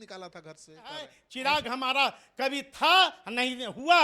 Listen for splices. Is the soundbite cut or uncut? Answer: cut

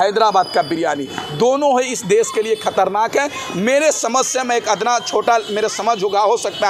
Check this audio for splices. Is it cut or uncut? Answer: uncut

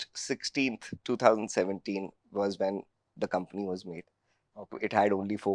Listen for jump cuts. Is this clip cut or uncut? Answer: uncut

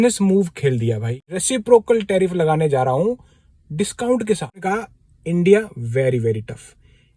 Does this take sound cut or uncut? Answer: cut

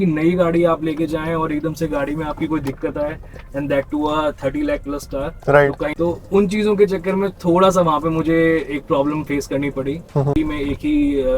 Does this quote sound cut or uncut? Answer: cut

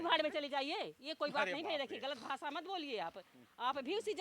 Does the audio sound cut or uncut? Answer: uncut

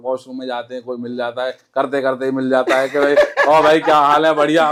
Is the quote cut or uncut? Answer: uncut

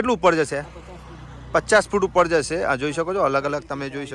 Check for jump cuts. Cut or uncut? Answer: uncut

